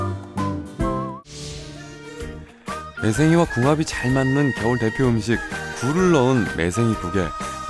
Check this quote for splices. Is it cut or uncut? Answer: cut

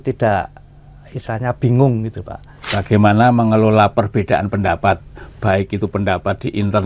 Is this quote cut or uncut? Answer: cut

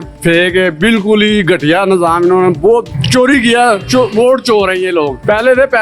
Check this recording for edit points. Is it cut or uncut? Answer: uncut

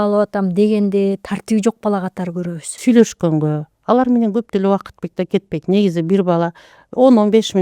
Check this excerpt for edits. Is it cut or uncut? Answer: cut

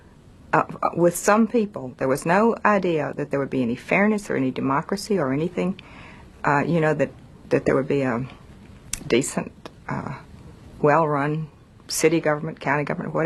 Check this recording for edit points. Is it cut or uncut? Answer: uncut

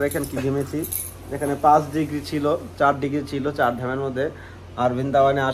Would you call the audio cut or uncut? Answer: uncut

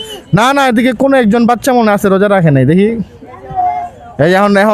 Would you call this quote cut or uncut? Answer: uncut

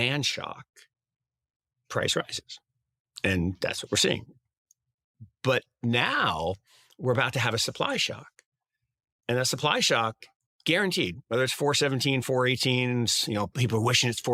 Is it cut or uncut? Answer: uncut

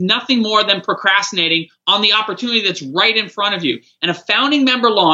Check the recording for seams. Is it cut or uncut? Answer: uncut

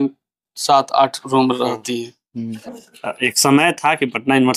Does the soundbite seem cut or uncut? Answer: cut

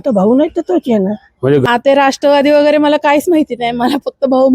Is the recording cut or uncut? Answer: cut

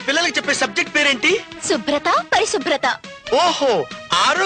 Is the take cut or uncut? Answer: uncut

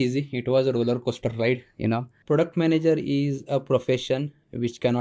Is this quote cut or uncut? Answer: cut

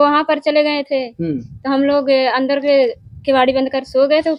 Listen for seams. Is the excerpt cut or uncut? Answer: uncut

